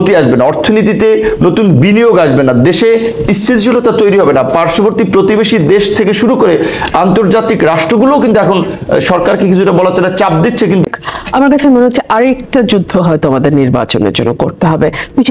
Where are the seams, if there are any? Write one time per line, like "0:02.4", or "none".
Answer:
0:10.9